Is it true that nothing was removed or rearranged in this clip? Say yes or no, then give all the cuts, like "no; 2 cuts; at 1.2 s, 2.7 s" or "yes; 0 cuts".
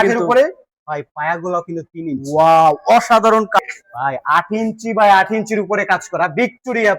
no; 1 cut; at 3.6 s